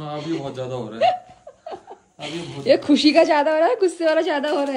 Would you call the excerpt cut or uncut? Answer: uncut